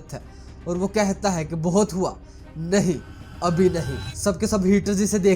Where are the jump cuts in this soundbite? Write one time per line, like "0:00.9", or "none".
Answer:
0:04.0